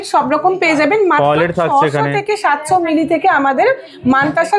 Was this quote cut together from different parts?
no; 0 cuts

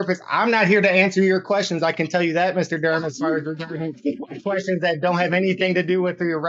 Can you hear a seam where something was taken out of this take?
no; 0 cuts

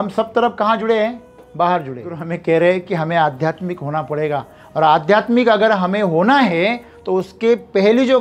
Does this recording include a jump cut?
yes; 1 cut; at 2.3 s

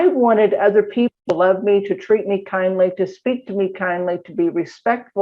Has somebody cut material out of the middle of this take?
yes; 1 cut; at 1.2 s

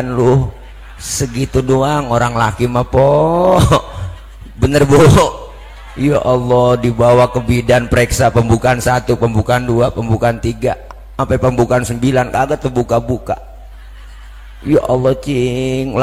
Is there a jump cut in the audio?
no; 0 cuts

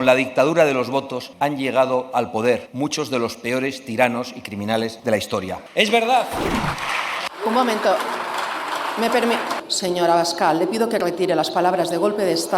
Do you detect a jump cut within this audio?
yes; 4 cuts; at 1.2 s, 2.7 s, 5.1 s, 9.6 s

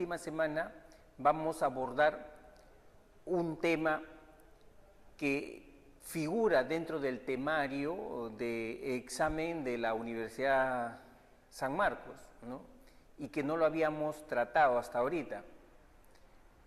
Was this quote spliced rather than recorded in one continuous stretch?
no; 0 cuts

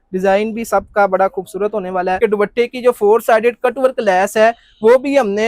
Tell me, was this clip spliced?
yes; 1 cut; at 2.2 s

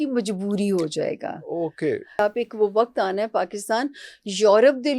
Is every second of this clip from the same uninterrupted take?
no; 1 cut; at 2.2 s

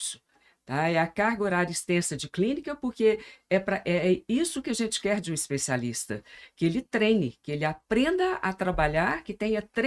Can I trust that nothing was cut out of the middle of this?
yes; 0 cuts

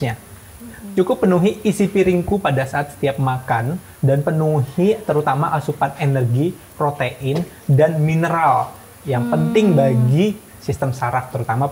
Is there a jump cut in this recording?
no; 0 cuts

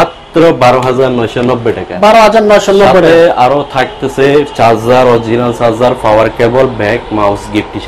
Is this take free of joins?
yes; 0 cuts

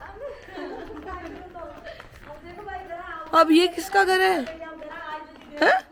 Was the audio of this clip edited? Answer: no; 0 cuts

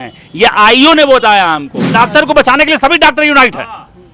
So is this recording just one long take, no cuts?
no; 1 cut; at 1.8 s

